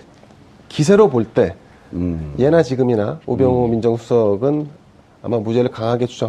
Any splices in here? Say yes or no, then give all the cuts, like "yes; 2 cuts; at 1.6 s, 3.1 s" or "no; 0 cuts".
yes; 1 cut; at 1.6 s